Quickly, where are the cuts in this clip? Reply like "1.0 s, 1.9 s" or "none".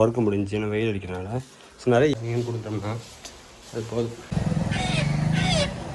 2.1 s, 4.2 s